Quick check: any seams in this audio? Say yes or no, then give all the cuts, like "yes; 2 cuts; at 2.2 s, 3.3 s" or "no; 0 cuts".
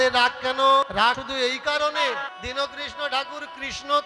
yes; 2 cuts; at 1.1 s, 2.3 s